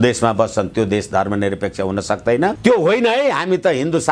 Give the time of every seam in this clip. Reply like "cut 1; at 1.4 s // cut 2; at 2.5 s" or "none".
cut 1; at 2.6 s